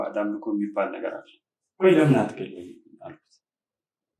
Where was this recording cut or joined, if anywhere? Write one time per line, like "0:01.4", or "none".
0:01.7